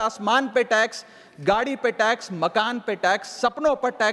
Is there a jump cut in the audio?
no; 0 cuts

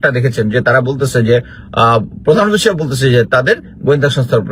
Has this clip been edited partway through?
no; 0 cuts

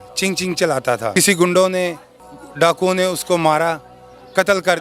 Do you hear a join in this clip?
yes; 1 cut; at 1.1 s

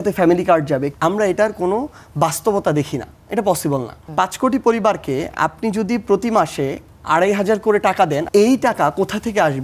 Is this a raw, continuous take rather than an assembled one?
no; 3 cuts; at 0.9 s, 4.0 s, 8.2 s

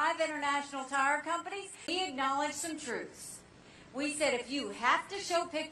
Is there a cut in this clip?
no; 0 cuts

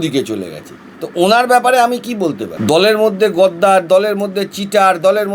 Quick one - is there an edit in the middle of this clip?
yes; 1 cut; at 2.5 s

